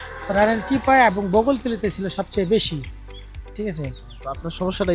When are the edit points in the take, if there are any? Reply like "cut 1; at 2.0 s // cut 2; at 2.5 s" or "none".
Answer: none